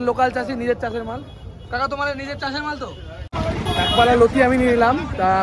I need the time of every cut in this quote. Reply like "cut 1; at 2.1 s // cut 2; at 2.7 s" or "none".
cut 1; at 3.3 s